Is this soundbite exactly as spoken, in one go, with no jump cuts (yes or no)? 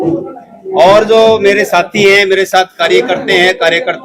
yes